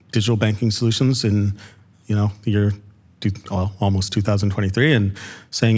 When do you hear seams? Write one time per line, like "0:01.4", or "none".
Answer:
none